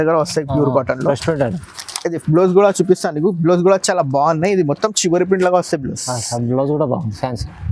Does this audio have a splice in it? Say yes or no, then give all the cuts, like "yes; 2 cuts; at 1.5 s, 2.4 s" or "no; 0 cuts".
no; 0 cuts